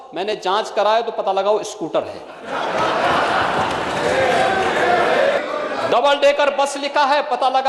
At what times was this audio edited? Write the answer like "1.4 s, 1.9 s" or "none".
5.4 s